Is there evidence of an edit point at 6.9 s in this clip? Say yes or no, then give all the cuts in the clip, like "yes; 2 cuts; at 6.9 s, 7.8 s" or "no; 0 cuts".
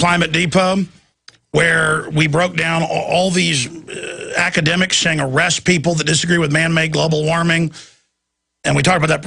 yes; 1 cut; at 6.9 s